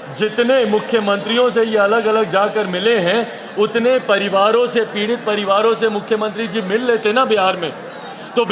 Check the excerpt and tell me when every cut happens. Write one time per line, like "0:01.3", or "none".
none